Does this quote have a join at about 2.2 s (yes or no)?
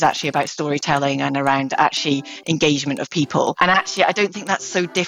no